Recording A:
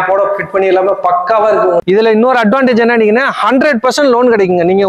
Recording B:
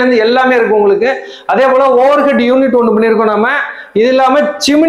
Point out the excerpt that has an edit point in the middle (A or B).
A